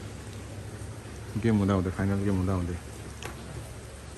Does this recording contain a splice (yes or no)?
no